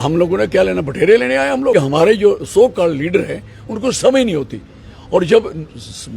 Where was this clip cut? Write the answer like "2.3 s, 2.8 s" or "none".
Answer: 1.7 s

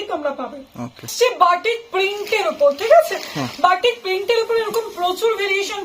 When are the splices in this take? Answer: 1.1 s

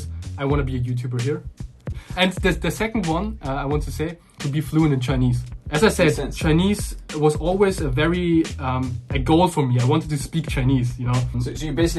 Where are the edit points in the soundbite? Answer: 2.0 s

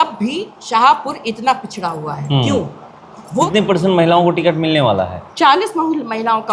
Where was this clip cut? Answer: 3.4 s

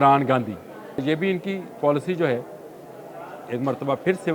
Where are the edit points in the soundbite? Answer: 1.0 s

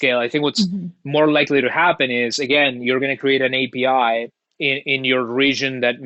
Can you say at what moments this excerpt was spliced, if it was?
none

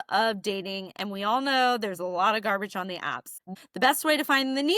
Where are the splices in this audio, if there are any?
3.4 s

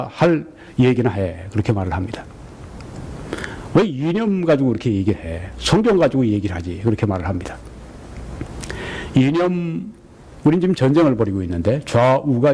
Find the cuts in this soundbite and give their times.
3.3 s

